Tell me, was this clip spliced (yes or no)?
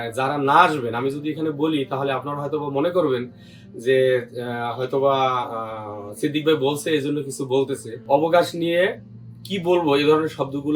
yes